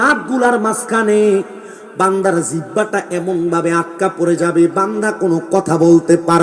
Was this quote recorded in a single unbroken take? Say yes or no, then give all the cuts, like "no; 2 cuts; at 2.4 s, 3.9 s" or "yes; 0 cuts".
yes; 0 cuts